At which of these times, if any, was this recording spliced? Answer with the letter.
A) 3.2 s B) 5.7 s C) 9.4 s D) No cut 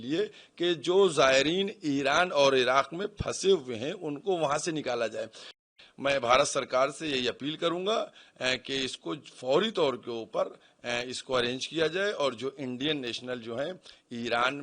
B